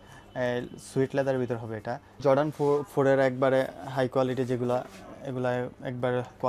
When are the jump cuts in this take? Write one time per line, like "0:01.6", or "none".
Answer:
0:02.2